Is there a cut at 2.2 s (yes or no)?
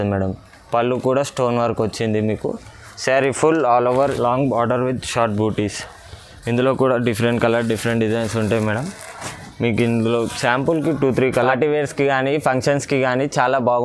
no